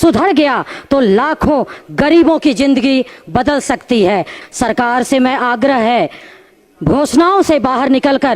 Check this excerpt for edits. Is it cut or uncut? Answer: cut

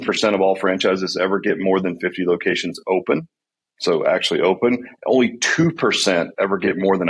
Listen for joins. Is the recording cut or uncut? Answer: uncut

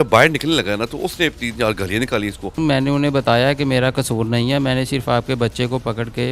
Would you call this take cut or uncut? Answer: cut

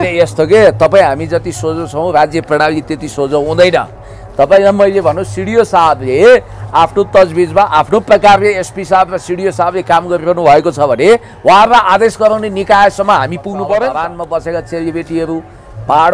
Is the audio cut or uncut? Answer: cut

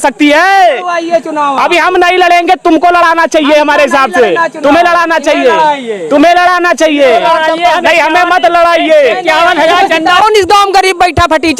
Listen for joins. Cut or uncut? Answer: cut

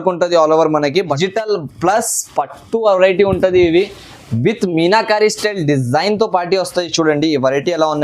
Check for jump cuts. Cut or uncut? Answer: cut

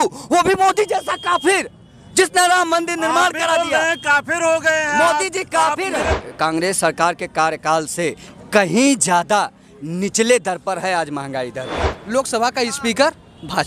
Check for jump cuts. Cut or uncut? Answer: cut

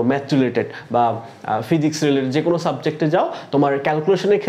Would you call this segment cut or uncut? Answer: uncut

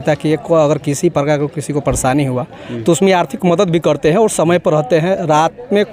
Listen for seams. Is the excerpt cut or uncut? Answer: uncut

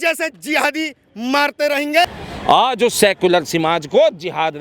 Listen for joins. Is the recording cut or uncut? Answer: cut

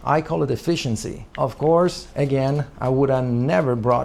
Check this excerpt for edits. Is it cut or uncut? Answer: uncut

